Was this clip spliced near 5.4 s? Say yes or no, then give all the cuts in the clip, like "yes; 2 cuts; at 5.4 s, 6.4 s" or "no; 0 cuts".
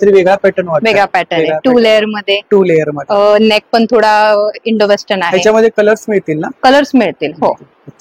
no; 0 cuts